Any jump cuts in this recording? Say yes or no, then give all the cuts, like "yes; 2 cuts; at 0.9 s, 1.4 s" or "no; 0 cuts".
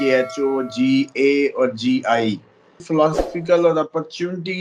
yes; 1 cut; at 2.8 s